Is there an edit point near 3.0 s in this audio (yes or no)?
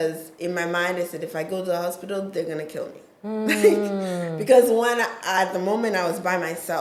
no